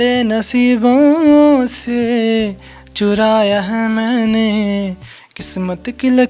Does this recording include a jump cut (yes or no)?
no